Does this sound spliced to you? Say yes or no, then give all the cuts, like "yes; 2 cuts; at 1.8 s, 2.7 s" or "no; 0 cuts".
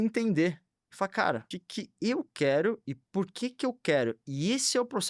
yes; 1 cut; at 1.6 s